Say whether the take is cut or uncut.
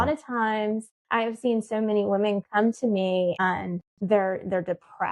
cut